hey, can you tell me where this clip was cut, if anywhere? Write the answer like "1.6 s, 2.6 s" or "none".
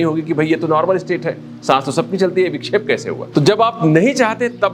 3.2 s